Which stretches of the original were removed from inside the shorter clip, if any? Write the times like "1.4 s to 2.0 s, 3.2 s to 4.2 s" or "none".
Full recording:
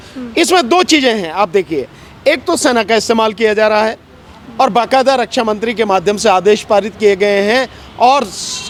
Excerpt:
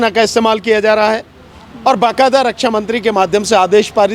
none